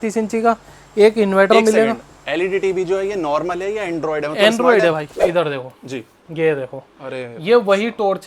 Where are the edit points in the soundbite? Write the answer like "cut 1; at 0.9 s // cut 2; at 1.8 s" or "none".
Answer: cut 1; at 5.2 s